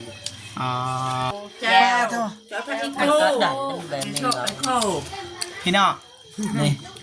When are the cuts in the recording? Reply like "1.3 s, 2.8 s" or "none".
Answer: 1.3 s